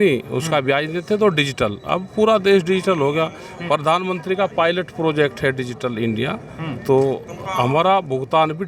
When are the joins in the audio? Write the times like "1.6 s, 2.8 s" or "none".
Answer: none